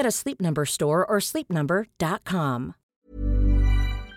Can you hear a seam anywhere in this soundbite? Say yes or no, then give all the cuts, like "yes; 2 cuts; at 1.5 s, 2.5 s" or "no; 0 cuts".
yes; 1 cut; at 2.8 s